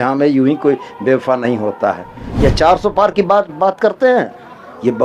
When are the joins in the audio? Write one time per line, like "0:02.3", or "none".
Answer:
0:02.3

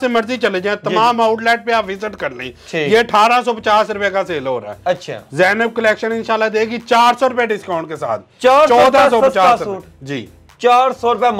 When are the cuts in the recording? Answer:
none

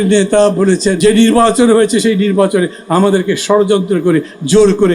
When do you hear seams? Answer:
0:01.0

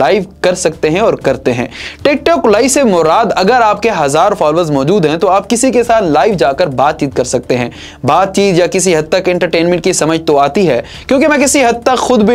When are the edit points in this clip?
none

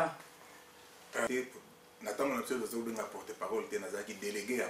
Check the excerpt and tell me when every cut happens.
0:01.3

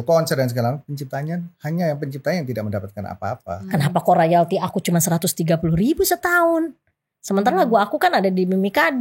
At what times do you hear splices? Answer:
0:03.6

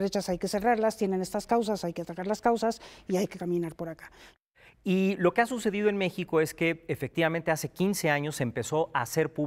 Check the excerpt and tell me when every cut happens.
0:04.3

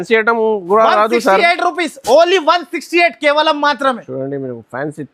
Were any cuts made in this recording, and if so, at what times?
none

